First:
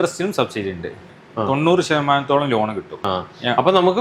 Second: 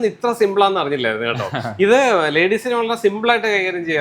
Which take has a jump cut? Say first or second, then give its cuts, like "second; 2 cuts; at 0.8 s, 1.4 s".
first; 2 cuts; at 1.1 s, 3.1 s